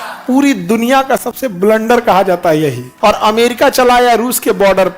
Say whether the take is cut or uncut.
cut